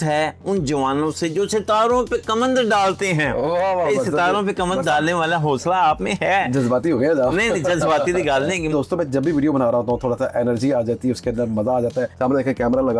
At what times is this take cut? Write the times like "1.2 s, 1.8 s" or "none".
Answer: 8.7 s, 12.1 s

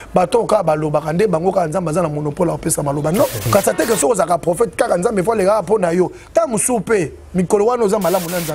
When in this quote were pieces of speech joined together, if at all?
3.4 s

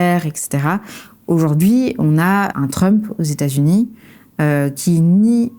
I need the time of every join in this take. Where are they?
2.5 s

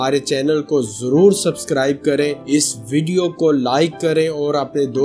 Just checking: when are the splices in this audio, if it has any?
none

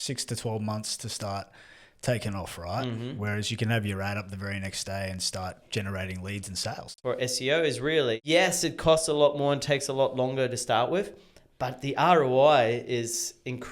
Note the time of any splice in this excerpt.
7.0 s, 8.2 s

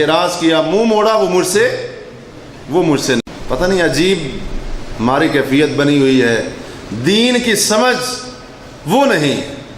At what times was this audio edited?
3.2 s

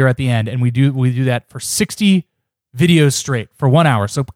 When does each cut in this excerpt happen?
none

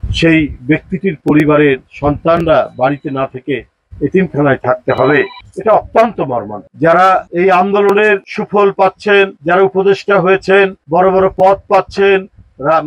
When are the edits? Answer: 6.7 s

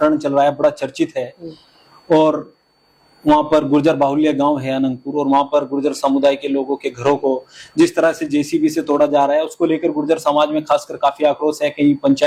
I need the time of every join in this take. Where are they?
none

